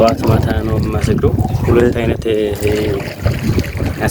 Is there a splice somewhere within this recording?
yes; 1 cut; at 1.4 s

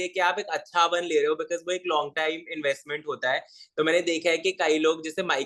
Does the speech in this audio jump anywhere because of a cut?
no; 0 cuts

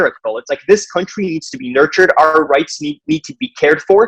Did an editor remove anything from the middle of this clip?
no; 0 cuts

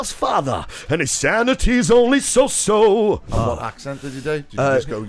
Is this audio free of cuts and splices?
no; 1 cut; at 3.3 s

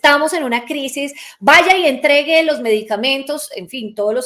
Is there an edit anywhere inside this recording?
no; 0 cuts

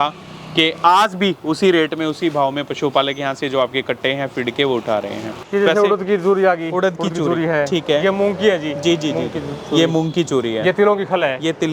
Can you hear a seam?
yes; 1 cut; at 5.4 s

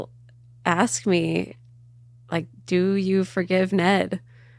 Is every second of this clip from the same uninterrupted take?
yes; 0 cuts

